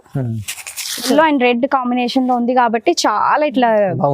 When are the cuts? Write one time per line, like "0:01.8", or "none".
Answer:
0:01.1

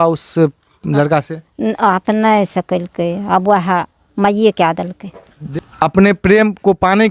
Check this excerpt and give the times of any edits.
0:05.5

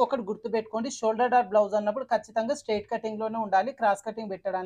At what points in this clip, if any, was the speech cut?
none

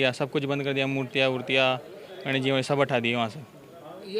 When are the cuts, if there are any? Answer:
none

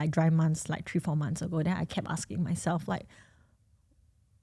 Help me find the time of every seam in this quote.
none

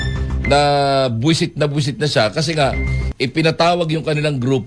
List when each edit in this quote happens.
0:03.0

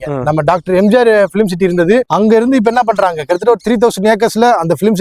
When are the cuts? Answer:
none

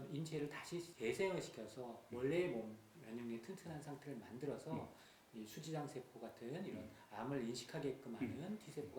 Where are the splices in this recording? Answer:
0:00.9

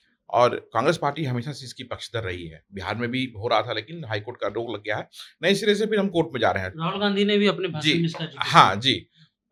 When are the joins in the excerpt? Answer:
none

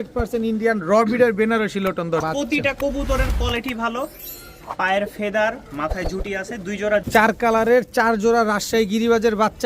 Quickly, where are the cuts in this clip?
0:02.2
0:07.1

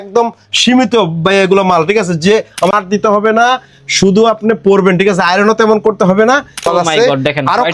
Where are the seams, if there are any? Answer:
0:02.7
0:06.7

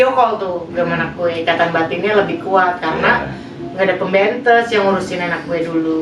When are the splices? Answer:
none

